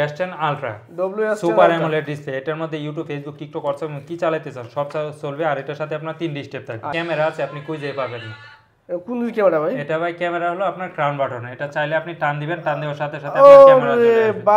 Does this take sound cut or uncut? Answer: cut